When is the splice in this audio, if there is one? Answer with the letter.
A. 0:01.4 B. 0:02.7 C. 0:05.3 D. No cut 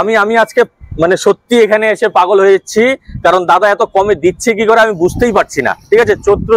D